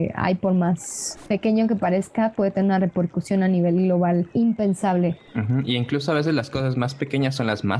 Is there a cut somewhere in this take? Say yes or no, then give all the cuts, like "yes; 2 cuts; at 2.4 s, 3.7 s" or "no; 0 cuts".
yes; 2 cuts; at 4.3 s, 5.2 s